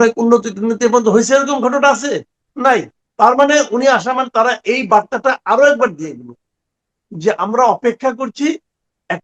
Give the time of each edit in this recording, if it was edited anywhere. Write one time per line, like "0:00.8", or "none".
0:03.0